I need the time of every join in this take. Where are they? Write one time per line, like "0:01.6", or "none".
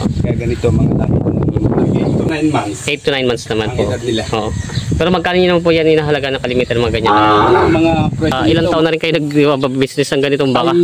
0:02.3
0:08.5